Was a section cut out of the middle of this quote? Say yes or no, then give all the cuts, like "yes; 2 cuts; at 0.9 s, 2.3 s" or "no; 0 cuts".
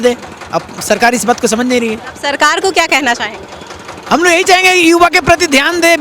no; 0 cuts